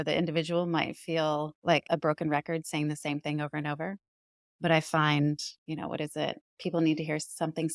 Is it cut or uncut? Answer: cut